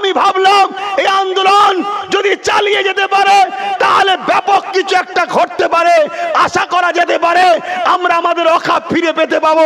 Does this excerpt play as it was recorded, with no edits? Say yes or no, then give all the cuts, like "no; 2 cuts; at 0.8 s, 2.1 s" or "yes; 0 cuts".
yes; 0 cuts